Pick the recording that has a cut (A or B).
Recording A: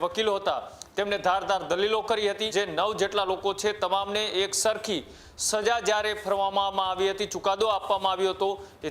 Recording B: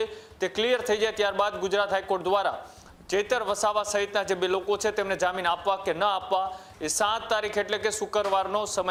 A